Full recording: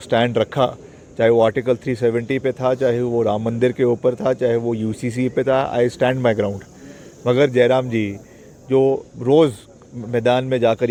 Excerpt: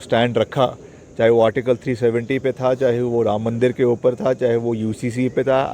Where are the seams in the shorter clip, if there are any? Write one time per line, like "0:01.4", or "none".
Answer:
none